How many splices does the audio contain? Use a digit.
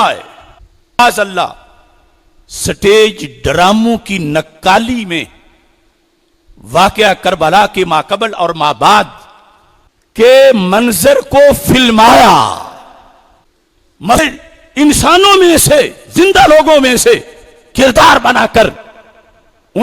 2